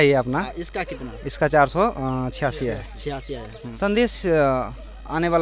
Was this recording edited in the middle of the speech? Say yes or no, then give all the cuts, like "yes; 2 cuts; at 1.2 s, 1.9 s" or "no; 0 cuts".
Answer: yes; 1 cut; at 3.6 s